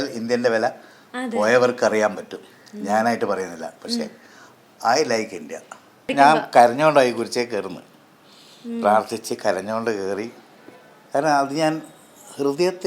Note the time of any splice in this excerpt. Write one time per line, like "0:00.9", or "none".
0:06.1